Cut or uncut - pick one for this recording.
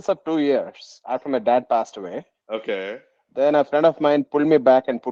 cut